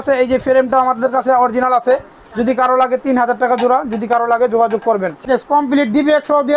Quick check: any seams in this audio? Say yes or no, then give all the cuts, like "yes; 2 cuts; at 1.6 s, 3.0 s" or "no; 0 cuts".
yes; 1 cut; at 5.2 s